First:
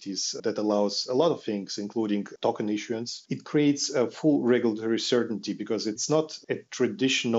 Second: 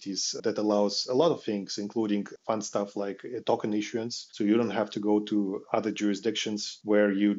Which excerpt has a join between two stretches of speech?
first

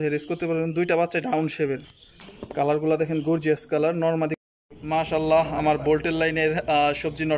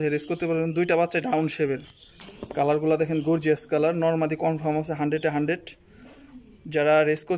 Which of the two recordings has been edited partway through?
first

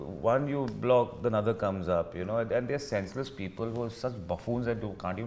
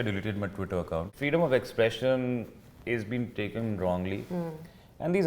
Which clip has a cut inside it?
second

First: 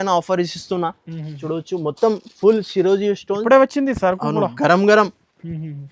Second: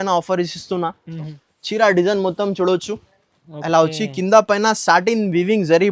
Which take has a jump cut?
second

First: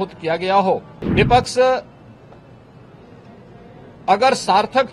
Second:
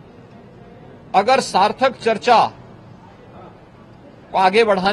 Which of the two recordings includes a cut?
first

